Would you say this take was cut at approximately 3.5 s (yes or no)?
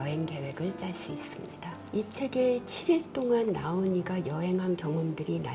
no